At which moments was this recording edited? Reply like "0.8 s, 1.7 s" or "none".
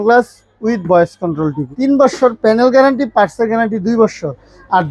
1.6 s